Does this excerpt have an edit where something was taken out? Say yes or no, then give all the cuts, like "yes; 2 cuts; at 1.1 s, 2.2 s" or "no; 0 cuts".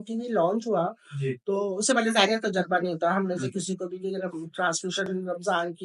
no; 0 cuts